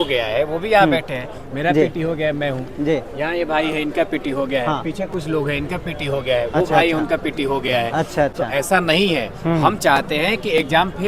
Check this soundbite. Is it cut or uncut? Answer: uncut